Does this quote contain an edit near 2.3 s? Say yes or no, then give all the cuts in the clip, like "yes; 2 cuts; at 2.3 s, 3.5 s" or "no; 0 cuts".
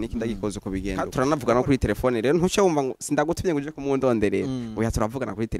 no; 1 cut; at 1.1 s